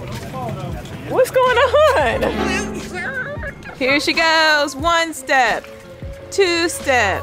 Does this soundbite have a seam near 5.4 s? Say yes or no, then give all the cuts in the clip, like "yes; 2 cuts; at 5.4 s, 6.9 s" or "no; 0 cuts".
no; 1 cut; at 3.7 s